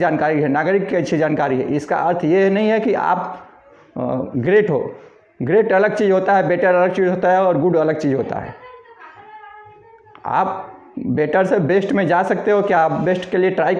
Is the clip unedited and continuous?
yes; 0 cuts

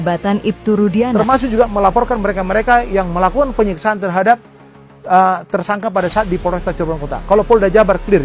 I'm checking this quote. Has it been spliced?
yes; 1 cut; at 1.1 s

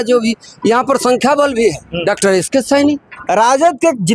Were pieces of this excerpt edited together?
yes; 2 cuts; at 1.9 s, 3.1 s

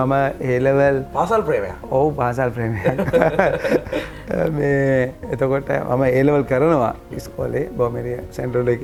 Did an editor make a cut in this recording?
no; 0 cuts

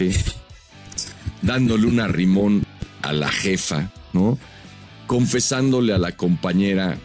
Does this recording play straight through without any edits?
yes; 0 cuts

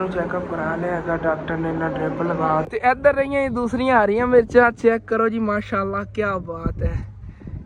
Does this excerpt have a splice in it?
yes; 1 cut; at 2.7 s

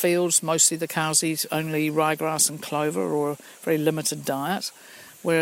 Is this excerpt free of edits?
yes; 0 cuts

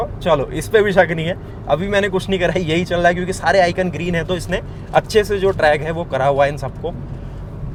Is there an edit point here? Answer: no; 0 cuts

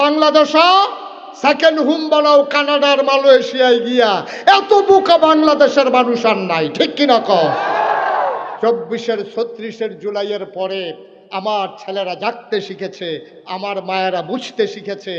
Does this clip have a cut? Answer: no; 0 cuts

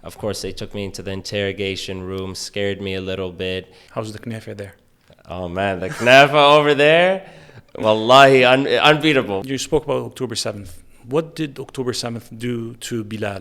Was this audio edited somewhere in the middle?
yes; 2 cuts; at 3.8 s, 9.4 s

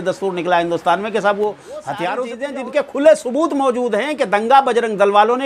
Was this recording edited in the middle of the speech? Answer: yes; 1 cut; at 2.4 s

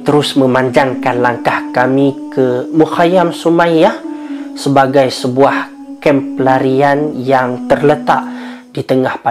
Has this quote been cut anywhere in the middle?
no; 0 cuts

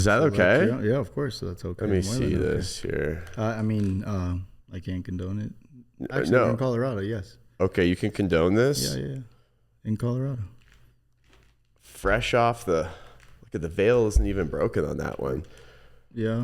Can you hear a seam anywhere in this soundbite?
no; 0 cuts

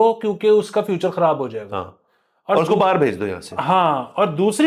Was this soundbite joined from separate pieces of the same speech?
no; 0 cuts

